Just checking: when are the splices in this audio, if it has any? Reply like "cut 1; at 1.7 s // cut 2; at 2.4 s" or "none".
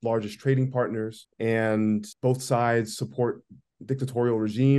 cut 1; at 1.2 s // cut 2; at 2.1 s